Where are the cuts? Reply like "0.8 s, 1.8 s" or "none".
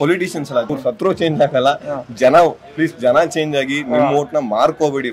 none